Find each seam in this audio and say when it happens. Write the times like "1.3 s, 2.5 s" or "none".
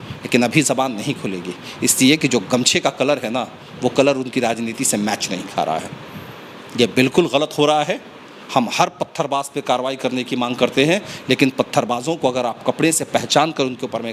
none